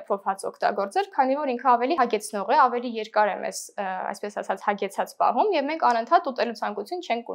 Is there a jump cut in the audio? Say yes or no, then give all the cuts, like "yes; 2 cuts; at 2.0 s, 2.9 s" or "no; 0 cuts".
no; 0 cuts